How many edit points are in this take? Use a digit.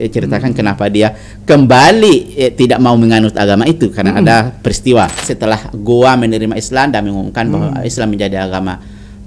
1